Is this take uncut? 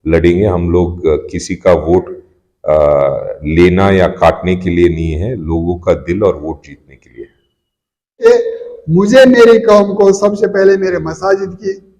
no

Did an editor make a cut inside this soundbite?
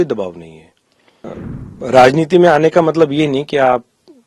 yes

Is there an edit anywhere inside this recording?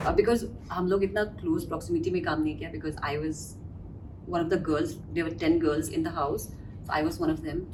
no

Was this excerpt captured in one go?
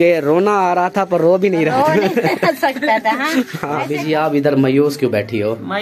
no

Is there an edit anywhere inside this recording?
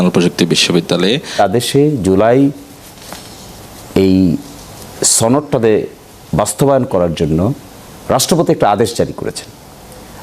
yes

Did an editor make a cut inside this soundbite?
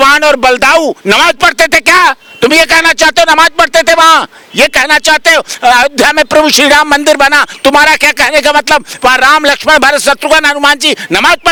no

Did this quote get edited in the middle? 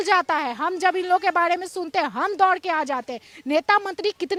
no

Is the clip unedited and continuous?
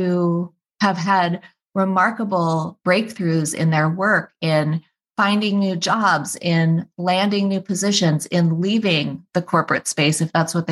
yes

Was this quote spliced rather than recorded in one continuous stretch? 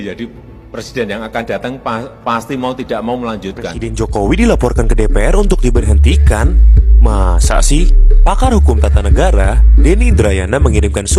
yes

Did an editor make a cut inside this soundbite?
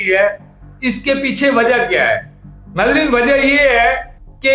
no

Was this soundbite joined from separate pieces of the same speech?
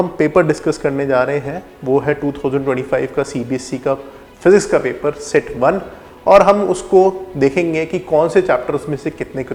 no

